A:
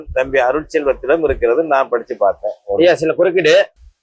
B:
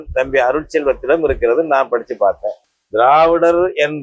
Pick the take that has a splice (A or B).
B